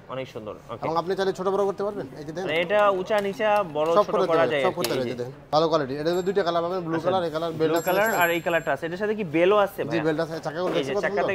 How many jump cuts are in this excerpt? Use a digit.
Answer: 1